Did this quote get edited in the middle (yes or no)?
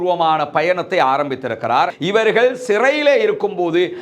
yes